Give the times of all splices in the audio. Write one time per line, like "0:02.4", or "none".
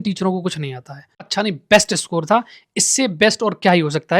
0:01.3